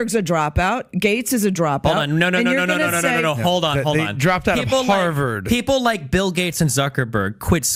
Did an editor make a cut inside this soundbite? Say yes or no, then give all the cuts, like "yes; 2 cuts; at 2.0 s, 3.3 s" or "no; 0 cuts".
no; 0 cuts